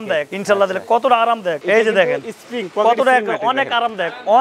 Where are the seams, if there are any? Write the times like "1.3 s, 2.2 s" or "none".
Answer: 1.6 s